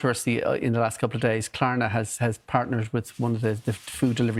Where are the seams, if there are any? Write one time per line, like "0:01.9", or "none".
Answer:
none

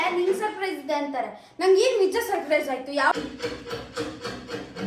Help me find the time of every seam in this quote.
0:03.1

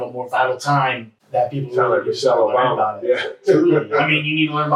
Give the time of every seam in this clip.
0:01.1

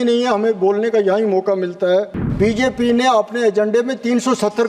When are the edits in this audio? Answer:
0:02.2

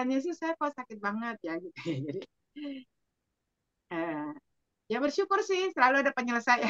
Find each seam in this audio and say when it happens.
none

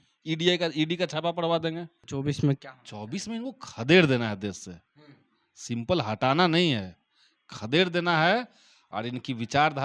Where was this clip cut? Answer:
0:01.9

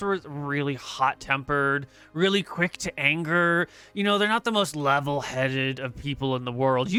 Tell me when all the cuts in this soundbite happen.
none

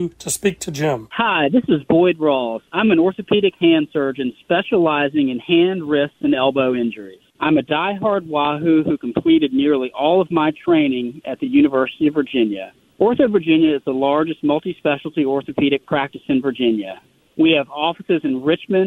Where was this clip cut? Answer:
0:01.0

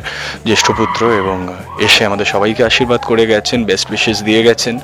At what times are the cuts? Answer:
none

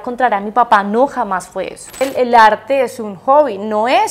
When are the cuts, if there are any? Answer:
0:02.0

